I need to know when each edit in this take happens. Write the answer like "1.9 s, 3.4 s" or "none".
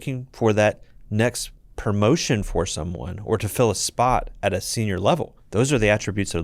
5.4 s